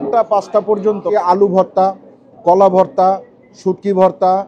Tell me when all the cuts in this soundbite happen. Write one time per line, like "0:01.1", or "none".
0:01.1